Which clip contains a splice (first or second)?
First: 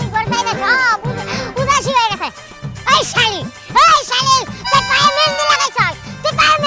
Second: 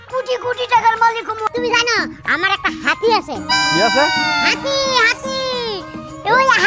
second